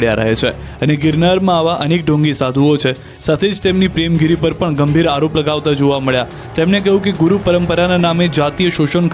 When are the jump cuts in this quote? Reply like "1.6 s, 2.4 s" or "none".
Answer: 3.5 s